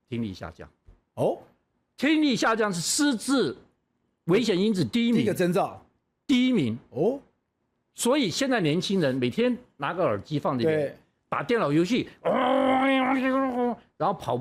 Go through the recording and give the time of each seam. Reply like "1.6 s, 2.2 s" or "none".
none